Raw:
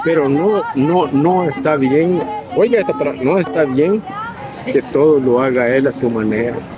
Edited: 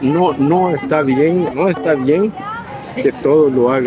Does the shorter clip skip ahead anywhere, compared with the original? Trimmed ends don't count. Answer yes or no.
yes